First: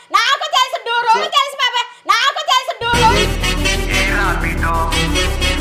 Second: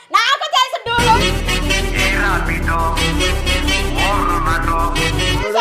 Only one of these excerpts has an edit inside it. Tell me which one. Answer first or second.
second